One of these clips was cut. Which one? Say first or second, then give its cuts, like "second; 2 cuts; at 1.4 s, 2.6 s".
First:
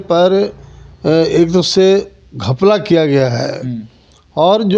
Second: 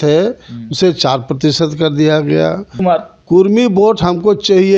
second; 1 cut; at 2.7 s